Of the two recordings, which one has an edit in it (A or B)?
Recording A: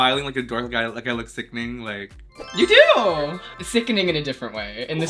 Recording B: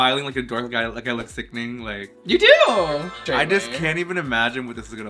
B